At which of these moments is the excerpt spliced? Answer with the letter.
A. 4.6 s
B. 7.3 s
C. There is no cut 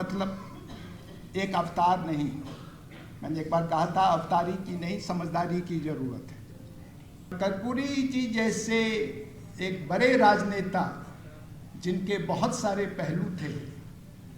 B